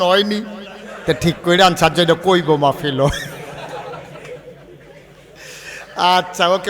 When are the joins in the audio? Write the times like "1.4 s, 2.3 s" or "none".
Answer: none